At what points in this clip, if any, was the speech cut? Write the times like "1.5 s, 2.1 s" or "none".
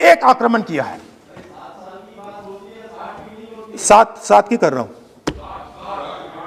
none